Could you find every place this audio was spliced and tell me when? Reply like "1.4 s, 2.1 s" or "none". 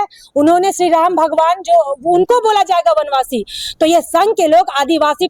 none